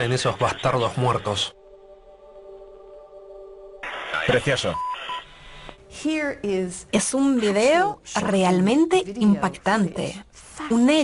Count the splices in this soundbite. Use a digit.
0